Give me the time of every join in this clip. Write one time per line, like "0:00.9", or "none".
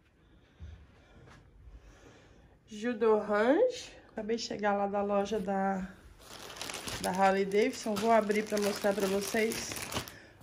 0:04.2